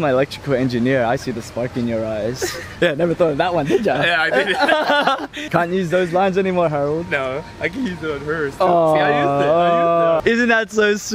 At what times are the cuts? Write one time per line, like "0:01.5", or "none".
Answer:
0:02.6
0:05.4
0:10.2